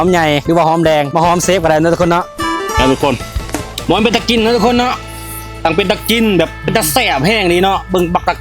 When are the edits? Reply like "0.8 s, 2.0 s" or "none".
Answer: 2.2 s